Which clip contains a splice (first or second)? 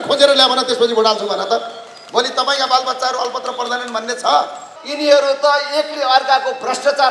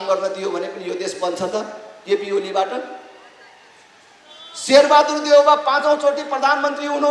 first